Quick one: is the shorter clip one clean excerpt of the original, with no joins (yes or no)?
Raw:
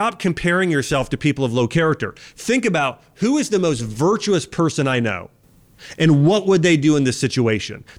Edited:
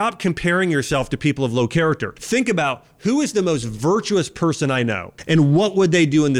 no